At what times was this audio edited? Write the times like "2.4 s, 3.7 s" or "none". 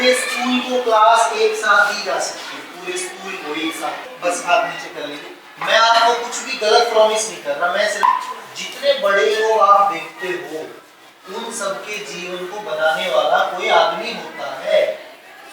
4.1 s, 8.0 s